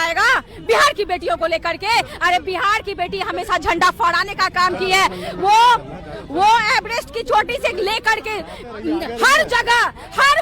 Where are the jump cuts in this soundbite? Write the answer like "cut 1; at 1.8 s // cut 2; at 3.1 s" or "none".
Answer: none